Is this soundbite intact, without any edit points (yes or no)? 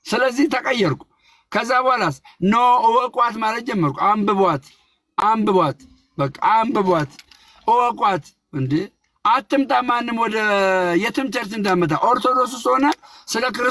yes